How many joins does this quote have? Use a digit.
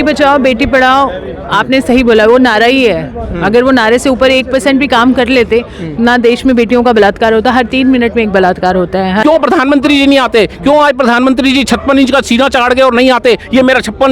1